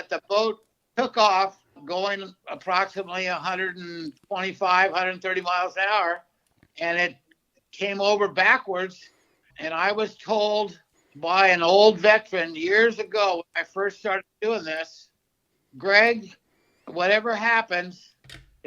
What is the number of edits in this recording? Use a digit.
1